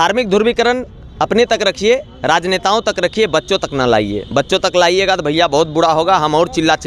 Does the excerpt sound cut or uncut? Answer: uncut